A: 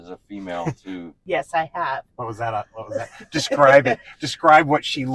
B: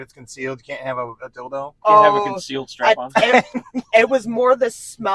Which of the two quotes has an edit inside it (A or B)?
A